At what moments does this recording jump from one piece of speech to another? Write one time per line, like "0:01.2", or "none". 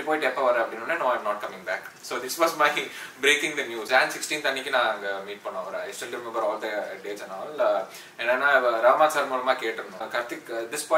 0:03.9
0:10.1